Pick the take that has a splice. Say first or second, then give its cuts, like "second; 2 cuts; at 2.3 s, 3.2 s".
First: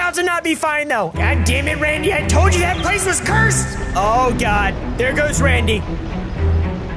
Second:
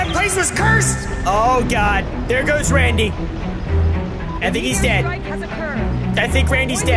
first; 1 cut; at 1.1 s